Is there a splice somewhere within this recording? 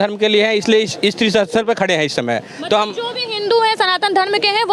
no; 0 cuts

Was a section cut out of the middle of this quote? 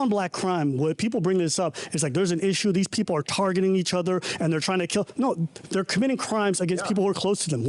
no; 0 cuts

